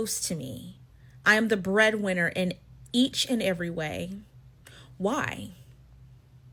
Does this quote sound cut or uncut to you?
uncut